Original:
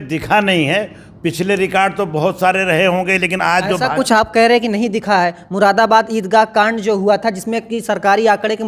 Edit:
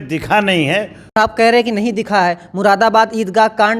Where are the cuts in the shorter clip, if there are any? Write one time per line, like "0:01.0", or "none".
0:01.2

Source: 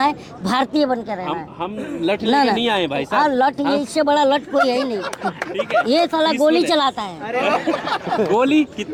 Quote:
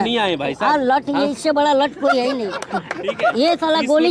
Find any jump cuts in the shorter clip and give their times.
none

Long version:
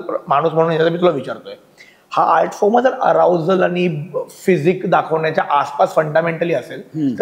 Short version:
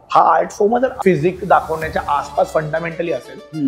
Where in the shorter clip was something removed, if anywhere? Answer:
0:00.9

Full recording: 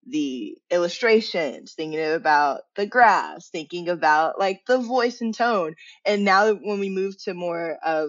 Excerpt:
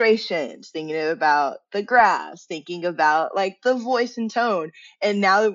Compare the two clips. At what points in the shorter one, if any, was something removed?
none

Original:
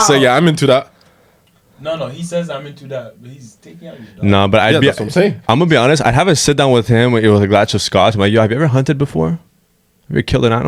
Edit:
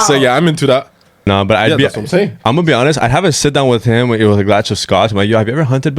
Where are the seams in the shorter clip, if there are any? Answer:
0:01.3

